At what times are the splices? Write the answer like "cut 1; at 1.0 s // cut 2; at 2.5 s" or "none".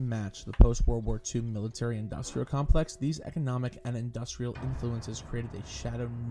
none